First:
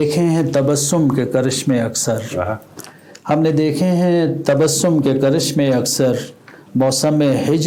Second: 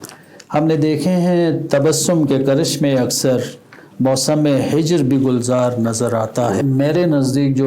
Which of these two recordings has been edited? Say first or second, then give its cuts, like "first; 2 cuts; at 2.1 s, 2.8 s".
second; 1 cut; at 6.6 s